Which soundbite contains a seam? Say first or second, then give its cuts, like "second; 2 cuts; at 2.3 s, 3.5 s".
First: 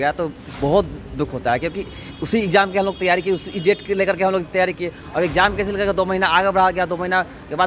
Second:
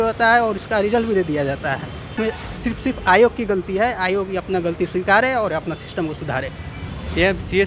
second; 2 cuts; at 2.1 s, 6.8 s